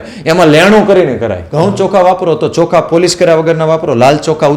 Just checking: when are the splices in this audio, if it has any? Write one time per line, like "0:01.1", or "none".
0:01.4